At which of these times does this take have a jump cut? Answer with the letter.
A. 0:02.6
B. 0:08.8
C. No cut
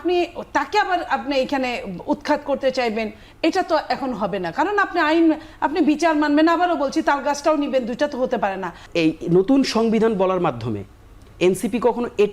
B